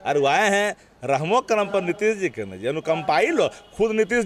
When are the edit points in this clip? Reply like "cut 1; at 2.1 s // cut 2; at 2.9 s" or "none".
none